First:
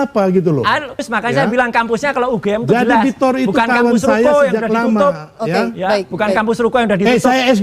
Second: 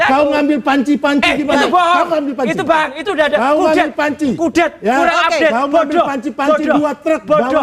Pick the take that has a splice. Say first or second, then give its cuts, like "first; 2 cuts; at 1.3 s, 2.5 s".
first; 1 cut; at 0.9 s